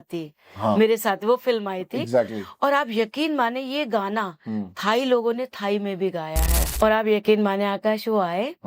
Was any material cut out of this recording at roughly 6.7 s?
yes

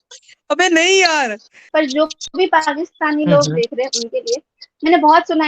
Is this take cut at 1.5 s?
yes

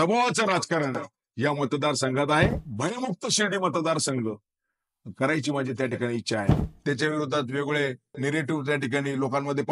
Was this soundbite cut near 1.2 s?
no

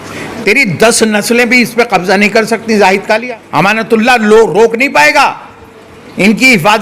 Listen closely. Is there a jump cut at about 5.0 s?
no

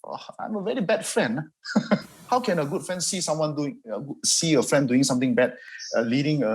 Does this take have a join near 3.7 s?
no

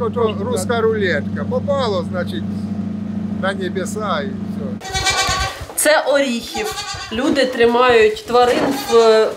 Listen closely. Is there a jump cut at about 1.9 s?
no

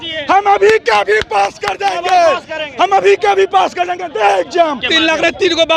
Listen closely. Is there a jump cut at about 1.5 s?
no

